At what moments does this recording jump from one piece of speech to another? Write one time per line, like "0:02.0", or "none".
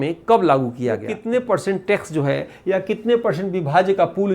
0:01.1